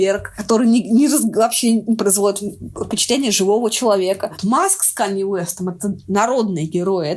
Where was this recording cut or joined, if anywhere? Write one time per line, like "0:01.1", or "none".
0:04.3